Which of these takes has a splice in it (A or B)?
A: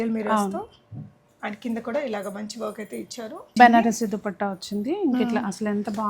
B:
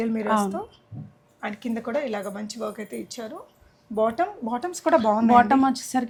A